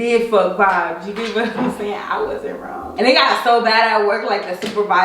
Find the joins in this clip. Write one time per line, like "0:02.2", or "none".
0:02.8